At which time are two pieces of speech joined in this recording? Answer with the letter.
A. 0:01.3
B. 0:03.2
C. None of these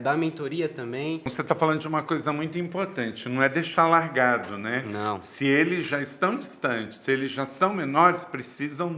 A